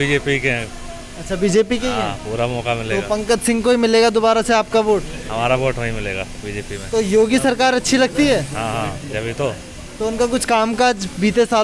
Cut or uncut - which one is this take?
uncut